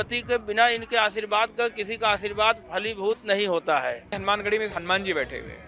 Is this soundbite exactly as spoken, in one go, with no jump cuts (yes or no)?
no